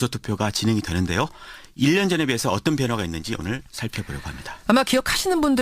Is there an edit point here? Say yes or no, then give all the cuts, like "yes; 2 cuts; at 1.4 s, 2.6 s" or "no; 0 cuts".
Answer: yes; 1 cut; at 1.5 s